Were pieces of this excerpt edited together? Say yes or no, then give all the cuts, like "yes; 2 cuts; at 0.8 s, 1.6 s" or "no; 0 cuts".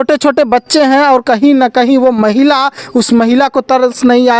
no; 0 cuts